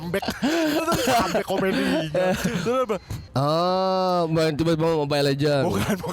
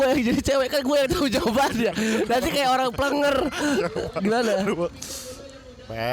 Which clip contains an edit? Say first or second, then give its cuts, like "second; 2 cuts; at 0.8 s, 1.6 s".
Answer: first; 1 cut; at 3.2 s